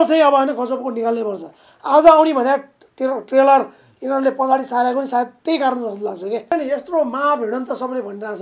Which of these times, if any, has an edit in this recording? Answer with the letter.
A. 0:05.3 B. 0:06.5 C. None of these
B